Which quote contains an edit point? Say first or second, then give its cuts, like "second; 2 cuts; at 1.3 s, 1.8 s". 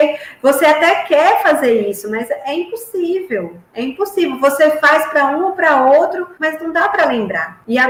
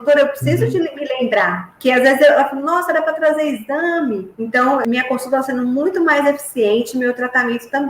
second; 1 cut; at 4.8 s